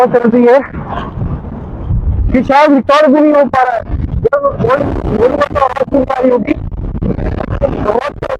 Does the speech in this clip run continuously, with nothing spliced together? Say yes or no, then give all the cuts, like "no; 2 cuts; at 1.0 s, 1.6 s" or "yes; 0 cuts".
yes; 0 cuts